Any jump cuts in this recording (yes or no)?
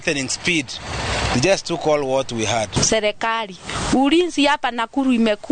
yes